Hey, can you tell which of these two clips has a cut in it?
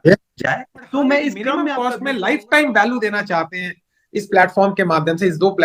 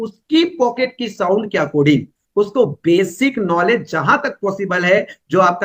first; 1 cut; at 1.7 s

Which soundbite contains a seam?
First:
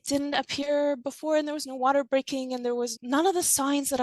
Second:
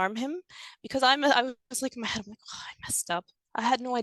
first; 1 cut; at 3.0 s

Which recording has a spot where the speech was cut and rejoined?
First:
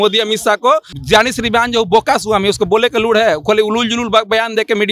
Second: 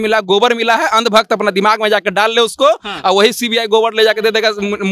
first; 1 cut; at 0.9 s

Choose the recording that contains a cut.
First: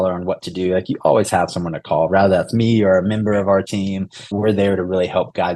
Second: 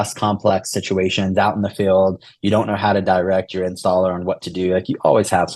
first; 1 cut; at 4.3 s

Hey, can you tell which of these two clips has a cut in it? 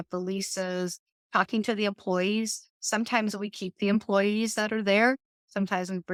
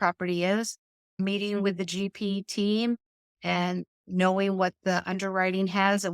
second; 1 cut; at 1.2 s

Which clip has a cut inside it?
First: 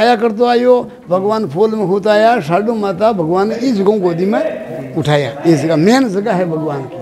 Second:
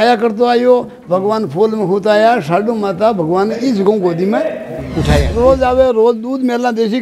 second; 1 cut; at 5.3 s

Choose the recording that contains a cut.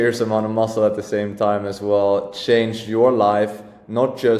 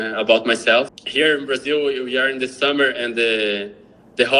second; 1 cut; at 1.0 s

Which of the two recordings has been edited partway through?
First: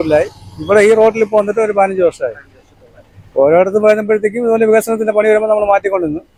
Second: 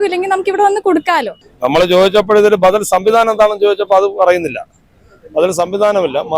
second; 1 cut; at 1.4 s

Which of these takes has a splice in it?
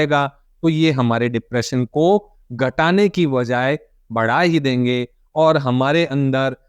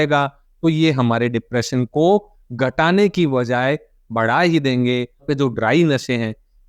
second; 1 cut; at 5.2 s

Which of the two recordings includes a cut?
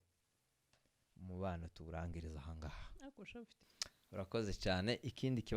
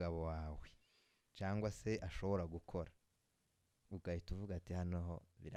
first; 1 cut; at 3.5 s

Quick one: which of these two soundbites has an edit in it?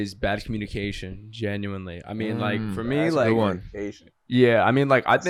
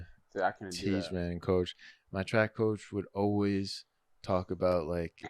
second; 1 cut; at 1.9 s

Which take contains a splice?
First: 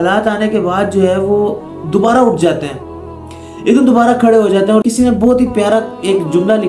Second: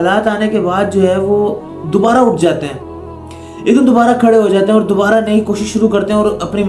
first; 1 cut; at 4.8 s

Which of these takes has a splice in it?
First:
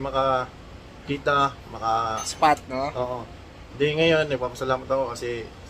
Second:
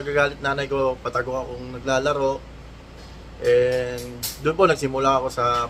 first; 1 cut; at 1.0 s

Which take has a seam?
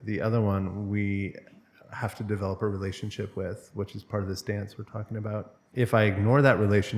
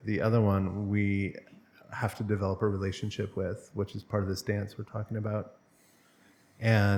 first; 1 cut; at 5.6 s

